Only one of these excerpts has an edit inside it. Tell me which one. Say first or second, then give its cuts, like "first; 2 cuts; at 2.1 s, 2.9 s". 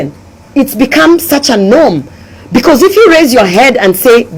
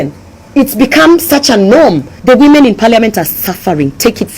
second; 1 cut; at 2.1 s